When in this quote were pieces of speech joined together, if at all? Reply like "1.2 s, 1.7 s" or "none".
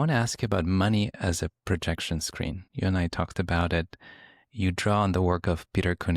2.6 s